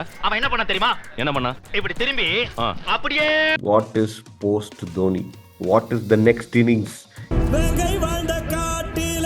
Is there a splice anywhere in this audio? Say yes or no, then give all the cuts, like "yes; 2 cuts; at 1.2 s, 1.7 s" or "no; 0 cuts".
yes; 1 cut; at 3.5 s